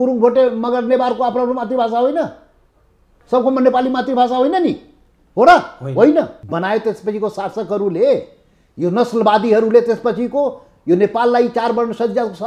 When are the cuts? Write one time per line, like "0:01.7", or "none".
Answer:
0:06.4